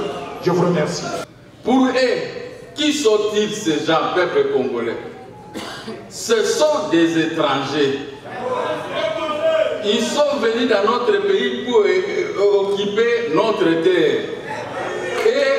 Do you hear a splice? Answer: yes; 1 cut; at 1.3 s

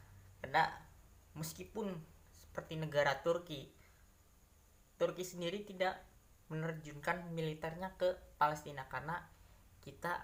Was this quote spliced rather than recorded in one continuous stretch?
no; 0 cuts

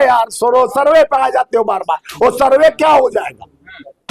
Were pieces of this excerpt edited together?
no; 0 cuts

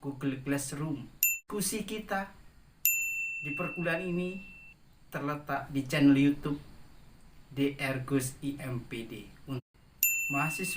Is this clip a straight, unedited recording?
no; 2 cuts; at 1.4 s, 9.6 s

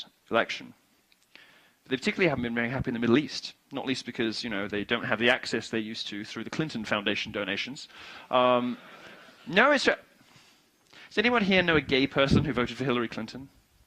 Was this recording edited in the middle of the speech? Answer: no; 0 cuts

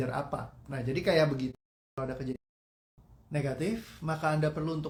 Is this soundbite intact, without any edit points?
yes; 0 cuts

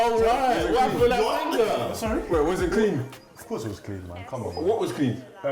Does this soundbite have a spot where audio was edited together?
no; 0 cuts

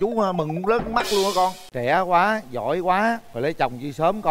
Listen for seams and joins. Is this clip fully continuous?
no; 1 cut; at 1.7 s

